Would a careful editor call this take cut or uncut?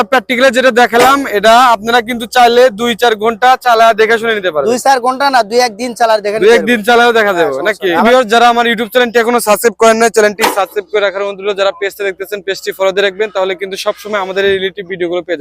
cut